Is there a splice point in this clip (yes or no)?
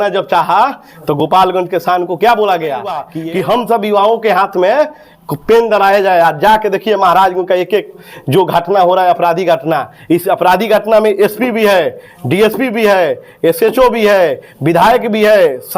yes